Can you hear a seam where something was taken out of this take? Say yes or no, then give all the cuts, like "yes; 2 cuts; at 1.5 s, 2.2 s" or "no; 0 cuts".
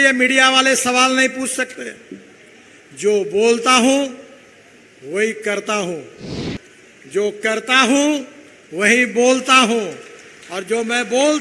no; 0 cuts